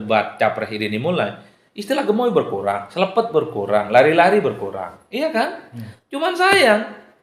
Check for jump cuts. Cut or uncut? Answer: uncut